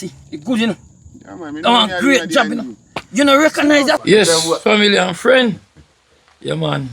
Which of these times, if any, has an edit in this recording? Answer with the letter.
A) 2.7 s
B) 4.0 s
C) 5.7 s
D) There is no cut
B